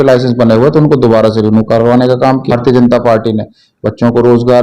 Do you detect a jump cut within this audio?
yes; 1 cut; at 2.6 s

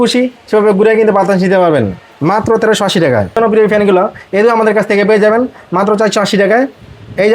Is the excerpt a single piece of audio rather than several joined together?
no; 1 cut; at 3.4 s

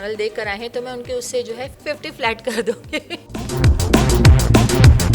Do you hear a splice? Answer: yes; 2 cuts; at 1.7 s, 3.2 s

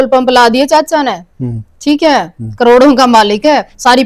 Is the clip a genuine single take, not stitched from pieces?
yes; 0 cuts

